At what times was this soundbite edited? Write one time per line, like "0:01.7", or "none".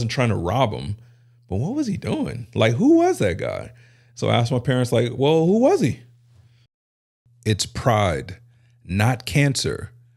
0:06.9